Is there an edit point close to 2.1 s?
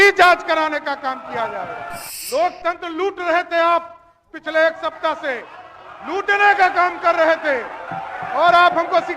yes; 1 cut; at 2.1 s

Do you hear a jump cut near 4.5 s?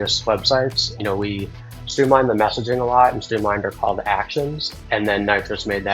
no; 1 cut; at 1.0 s

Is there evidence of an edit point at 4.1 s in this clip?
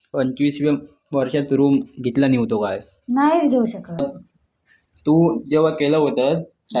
yes; 1 cut; at 4.1 s

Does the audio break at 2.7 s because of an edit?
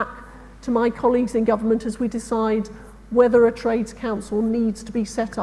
no; 0 cuts

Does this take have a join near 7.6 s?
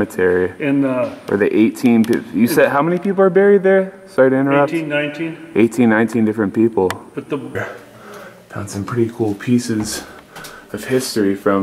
yes; 1 cut; at 7.6 s

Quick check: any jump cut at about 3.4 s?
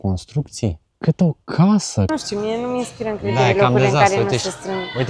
no; 1 cut; at 2.1 s

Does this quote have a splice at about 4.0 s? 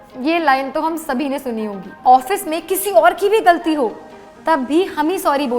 no; 1 cut; at 2.0 s

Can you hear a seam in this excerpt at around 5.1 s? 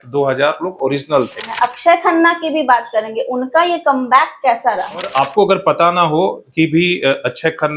yes; 2 cuts; at 1.5 s, 5.1 s

